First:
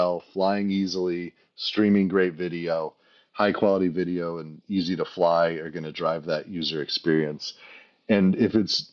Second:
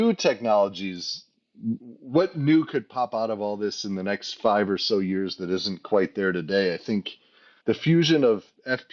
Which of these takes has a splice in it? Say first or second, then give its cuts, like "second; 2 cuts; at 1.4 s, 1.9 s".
second; 2 cuts; at 1.8 s, 7.4 s